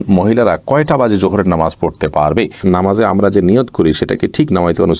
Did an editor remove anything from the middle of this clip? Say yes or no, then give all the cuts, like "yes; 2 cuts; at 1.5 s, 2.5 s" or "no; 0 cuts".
yes; 1 cut; at 2.6 s